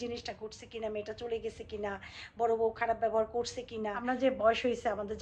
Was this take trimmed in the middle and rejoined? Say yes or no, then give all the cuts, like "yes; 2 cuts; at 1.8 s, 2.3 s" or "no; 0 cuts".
yes; 1 cut; at 4.0 s